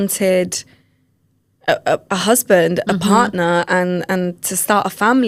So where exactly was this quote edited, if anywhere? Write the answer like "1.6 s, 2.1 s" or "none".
none